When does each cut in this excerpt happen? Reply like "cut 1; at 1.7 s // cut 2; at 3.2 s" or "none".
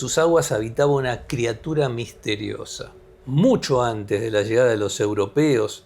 none

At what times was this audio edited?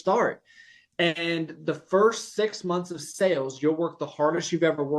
none

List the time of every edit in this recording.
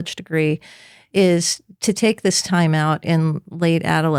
none

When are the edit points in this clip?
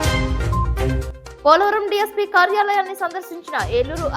cut 1; at 1.0 s

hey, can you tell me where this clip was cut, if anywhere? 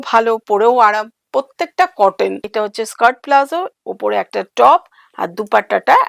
cut 1; at 2.4 s

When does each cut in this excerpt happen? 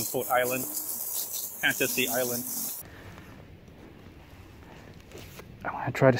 cut 1; at 2.8 s

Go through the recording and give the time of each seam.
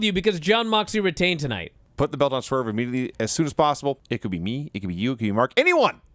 cut 1; at 1.8 s // cut 2; at 3.1 s

